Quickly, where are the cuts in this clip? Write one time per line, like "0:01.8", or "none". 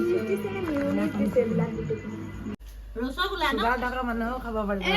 0:02.5